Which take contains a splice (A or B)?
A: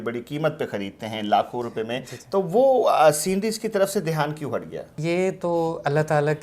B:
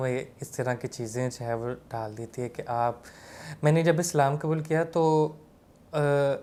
A